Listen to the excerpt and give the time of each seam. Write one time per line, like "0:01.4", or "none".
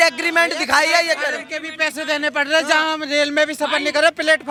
none